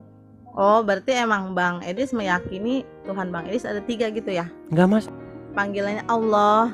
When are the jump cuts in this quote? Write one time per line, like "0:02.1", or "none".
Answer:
0:05.0